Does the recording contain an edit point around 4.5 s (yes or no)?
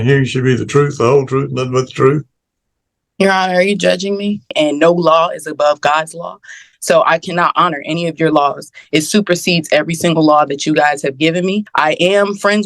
yes